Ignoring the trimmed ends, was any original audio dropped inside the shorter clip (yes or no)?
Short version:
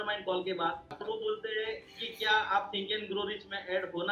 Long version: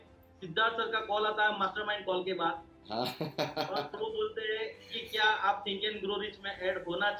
yes